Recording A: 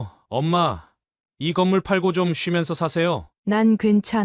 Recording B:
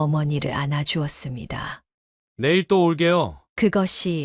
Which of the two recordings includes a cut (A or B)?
A